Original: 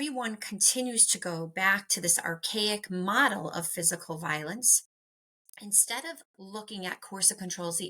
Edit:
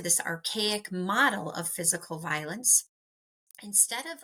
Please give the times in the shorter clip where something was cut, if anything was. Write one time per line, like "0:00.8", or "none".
none